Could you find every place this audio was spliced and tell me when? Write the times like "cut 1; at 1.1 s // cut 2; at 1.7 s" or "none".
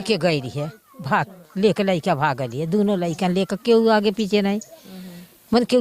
none